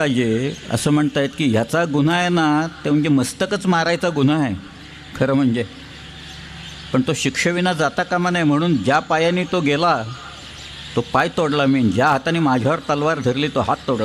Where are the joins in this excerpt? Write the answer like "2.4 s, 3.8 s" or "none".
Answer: none